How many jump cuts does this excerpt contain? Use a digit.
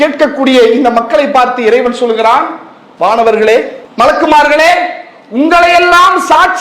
1